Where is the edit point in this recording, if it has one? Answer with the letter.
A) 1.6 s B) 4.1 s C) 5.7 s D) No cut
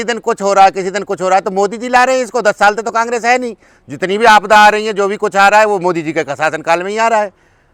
D